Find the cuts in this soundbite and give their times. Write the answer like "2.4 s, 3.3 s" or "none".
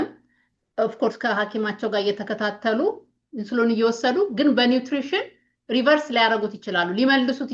none

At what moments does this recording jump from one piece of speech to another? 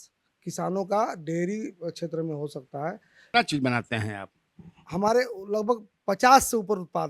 3.2 s

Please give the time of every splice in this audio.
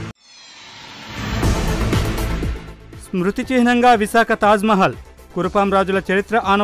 none

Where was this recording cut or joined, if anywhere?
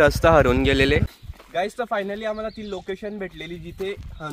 1.1 s

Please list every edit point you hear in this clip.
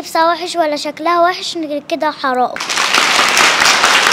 2.6 s

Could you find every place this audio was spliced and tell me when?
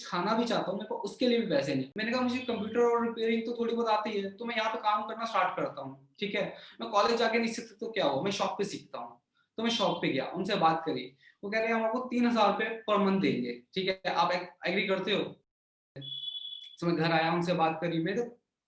1.9 s, 15.6 s

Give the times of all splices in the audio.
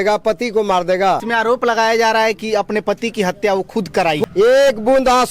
1.2 s, 4.2 s

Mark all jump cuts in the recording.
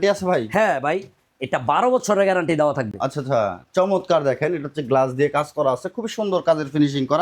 none

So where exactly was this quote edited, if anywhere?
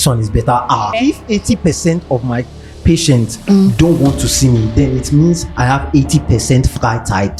0.9 s

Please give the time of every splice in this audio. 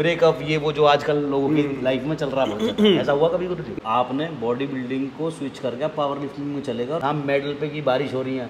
3.7 s, 7.0 s

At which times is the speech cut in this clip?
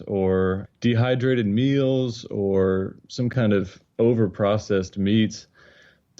3.8 s

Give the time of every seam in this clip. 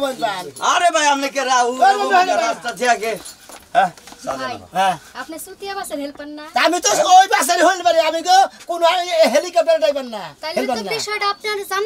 none

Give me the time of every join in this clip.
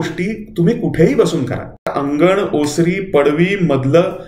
1.9 s

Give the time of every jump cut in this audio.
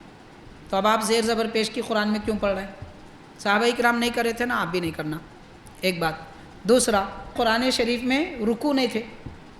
none

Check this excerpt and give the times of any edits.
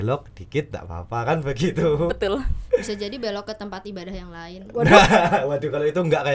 none

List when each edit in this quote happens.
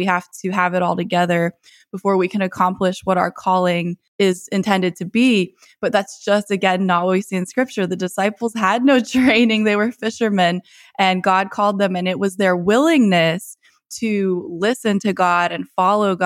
4.0 s

